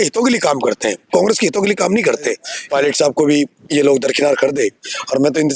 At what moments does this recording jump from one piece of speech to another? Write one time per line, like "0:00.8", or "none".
0:02.5